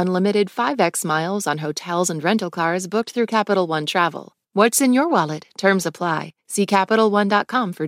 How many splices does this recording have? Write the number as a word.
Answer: one